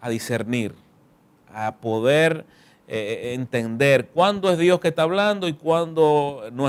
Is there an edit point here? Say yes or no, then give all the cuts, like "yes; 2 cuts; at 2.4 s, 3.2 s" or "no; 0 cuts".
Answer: no; 0 cuts